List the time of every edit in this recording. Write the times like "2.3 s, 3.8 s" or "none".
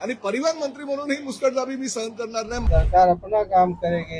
2.6 s